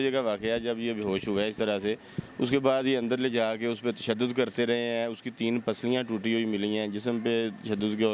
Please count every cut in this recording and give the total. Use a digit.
0